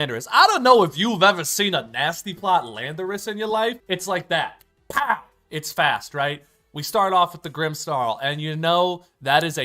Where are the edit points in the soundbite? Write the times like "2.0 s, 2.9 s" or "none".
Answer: 3.8 s